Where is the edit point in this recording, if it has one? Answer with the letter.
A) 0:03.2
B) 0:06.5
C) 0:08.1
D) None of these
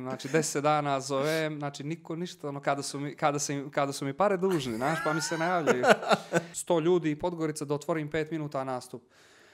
B